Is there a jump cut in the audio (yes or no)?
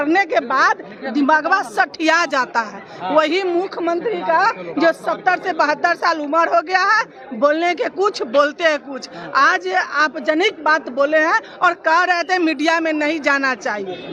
no